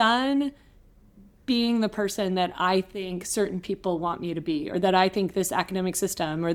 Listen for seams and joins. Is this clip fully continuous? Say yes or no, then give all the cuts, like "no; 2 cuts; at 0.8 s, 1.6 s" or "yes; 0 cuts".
yes; 0 cuts